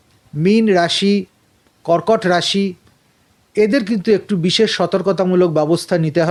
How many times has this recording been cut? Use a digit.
0